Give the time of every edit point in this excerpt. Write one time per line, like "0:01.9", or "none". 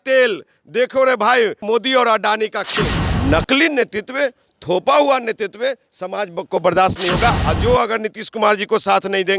0:01.6
0:03.0
0:07.4